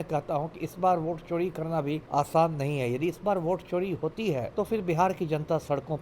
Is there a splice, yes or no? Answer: yes